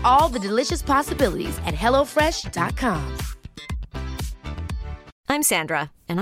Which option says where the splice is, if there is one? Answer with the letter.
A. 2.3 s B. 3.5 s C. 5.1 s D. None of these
C